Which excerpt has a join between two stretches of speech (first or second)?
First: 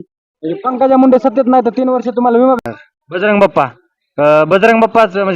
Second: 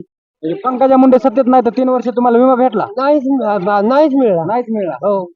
first